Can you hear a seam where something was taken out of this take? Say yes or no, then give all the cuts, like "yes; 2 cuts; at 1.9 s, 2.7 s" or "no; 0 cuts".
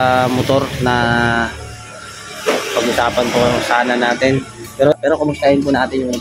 yes; 1 cut; at 4.9 s